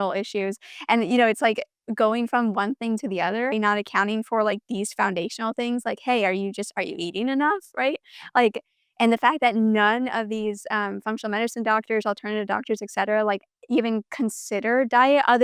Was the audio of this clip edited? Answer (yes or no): yes